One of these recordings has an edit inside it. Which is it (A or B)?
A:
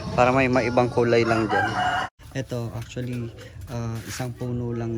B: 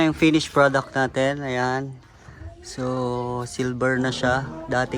A